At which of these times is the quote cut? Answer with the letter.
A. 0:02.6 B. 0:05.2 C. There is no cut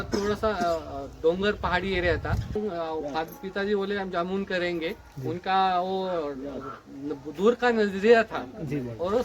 A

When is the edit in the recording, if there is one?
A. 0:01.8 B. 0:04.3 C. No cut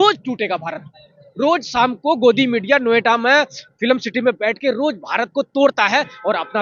C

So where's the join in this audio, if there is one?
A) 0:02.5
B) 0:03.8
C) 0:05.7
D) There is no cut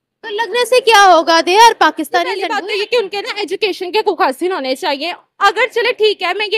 A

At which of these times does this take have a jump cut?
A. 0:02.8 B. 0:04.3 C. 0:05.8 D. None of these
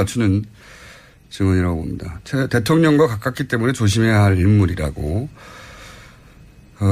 B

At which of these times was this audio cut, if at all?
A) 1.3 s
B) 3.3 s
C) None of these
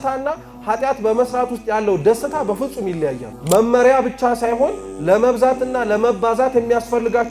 B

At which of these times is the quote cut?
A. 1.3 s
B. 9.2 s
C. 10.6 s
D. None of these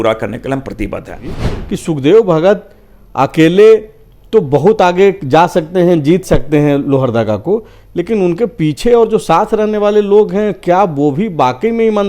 A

